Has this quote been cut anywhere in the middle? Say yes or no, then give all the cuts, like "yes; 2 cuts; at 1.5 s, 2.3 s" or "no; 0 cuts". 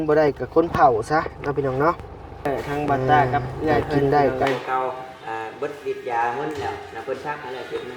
yes; 1 cut; at 4.4 s